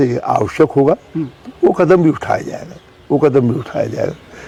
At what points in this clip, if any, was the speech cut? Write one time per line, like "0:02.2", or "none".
none